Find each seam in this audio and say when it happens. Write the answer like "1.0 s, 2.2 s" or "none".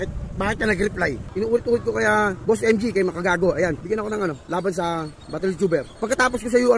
1.2 s, 2.4 s, 3.8 s, 6.0 s